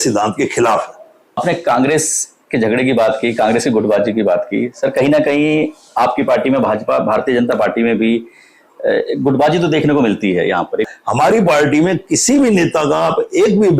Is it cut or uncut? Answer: cut